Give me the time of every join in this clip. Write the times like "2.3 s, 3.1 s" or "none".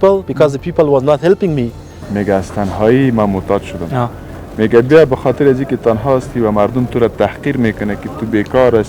2.0 s